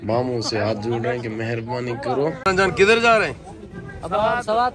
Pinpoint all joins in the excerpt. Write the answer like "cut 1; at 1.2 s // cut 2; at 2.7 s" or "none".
cut 1; at 2.4 s